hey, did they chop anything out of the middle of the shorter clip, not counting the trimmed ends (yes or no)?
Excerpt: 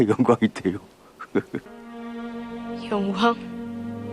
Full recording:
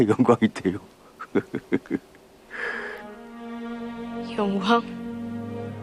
yes